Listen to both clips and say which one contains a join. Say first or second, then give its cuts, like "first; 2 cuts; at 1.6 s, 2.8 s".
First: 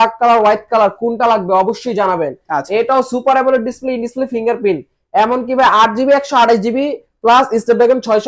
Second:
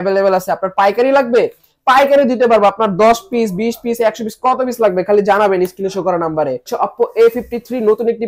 second; 1 cut; at 6.7 s